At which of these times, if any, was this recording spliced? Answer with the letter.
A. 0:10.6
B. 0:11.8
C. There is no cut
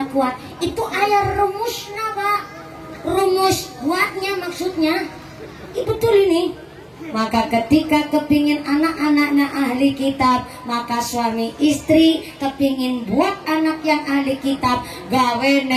C